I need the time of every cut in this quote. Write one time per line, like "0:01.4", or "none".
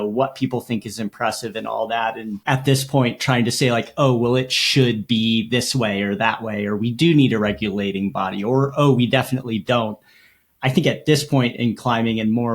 0:02.4